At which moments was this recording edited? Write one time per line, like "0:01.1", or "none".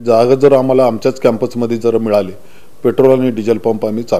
none